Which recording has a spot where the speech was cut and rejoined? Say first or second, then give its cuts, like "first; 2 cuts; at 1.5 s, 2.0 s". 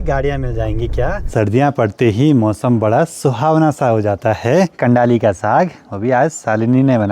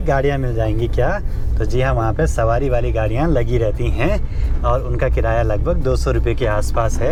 first; 2 cuts; at 1.3 s, 4.8 s